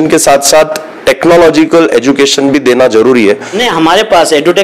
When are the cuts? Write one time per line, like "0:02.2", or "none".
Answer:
0:03.6